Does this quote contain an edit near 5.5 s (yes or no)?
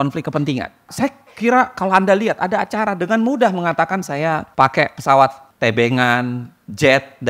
yes